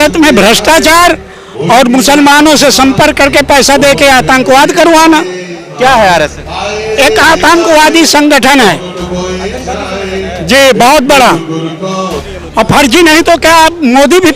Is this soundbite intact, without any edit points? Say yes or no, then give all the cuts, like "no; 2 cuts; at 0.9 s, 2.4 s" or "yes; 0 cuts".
no; 2 cuts; at 5.7 s, 12.2 s